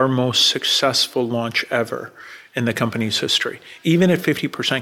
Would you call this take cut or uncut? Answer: uncut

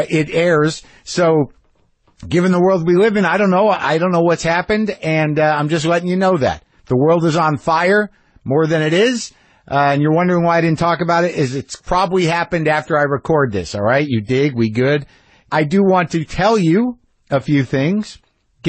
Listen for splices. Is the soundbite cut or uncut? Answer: uncut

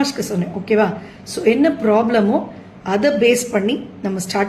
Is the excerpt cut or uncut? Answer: cut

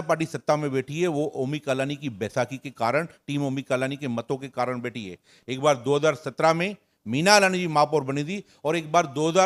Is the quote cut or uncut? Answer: uncut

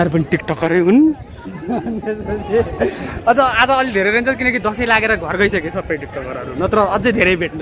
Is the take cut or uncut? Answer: uncut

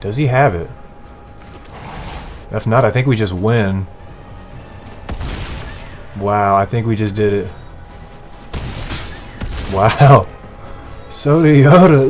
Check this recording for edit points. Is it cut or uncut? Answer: cut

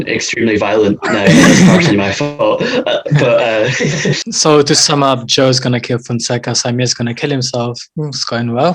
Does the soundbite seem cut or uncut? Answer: uncut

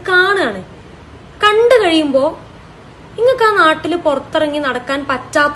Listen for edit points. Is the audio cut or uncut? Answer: uncut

